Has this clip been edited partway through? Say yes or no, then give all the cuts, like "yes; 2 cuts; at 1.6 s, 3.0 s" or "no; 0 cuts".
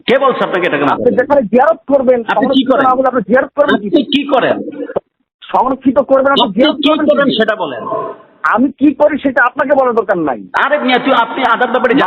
no; 0 cuts